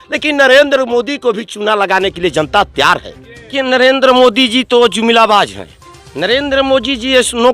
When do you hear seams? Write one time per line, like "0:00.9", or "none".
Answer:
0:03.5